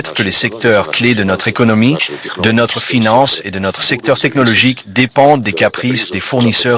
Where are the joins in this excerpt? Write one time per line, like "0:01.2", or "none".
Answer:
none